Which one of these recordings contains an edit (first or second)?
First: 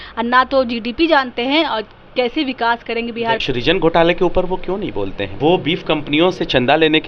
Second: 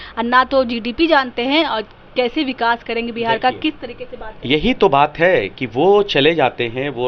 first